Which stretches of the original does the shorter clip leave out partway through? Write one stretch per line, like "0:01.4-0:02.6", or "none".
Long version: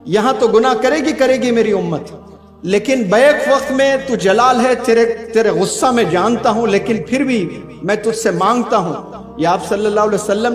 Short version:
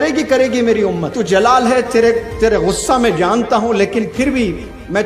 0:02.1-0:04.1